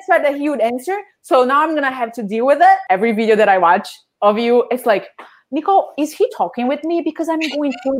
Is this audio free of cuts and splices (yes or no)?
no